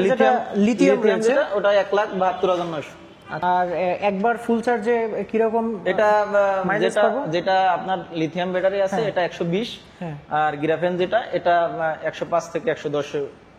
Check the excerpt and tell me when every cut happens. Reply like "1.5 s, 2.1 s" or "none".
3.4 s